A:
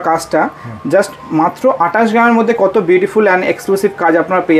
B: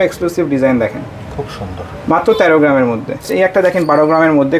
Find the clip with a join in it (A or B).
B